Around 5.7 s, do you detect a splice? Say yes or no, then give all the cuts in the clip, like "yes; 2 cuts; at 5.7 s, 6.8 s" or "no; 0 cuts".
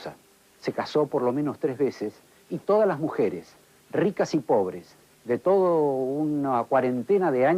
no; 1 cut; at 1.6 s